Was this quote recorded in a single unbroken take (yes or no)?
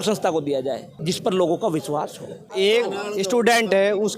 no